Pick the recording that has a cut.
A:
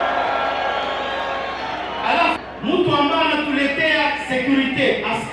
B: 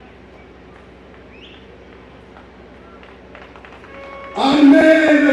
A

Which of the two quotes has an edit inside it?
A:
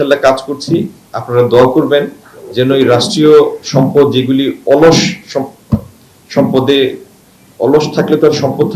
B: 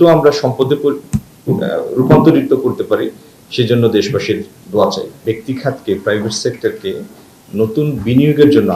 B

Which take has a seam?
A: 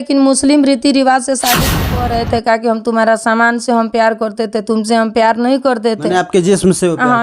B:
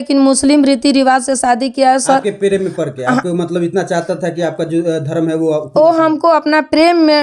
A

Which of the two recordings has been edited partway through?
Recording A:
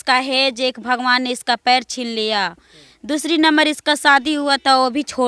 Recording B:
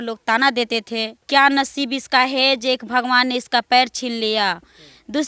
B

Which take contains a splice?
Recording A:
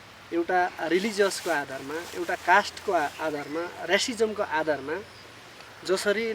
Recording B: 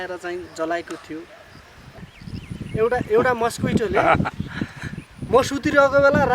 B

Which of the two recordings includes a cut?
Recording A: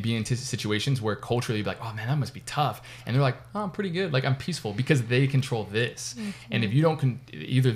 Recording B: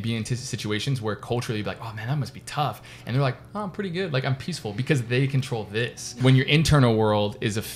B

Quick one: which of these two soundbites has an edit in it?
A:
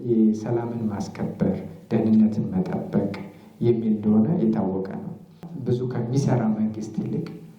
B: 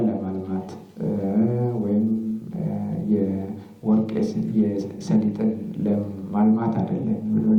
A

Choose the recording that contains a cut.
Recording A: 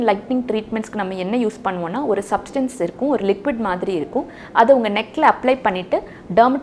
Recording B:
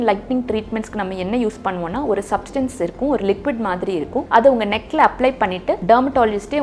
B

